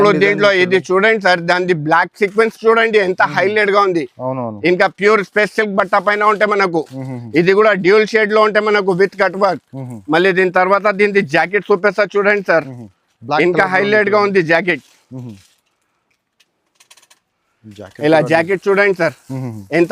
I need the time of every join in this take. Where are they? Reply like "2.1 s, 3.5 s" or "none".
none